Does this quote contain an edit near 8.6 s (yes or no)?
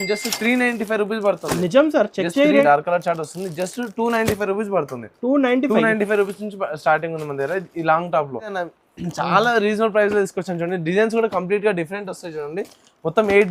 yes